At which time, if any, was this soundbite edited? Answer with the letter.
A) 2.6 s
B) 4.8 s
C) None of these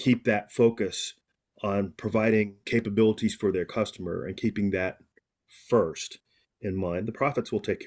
A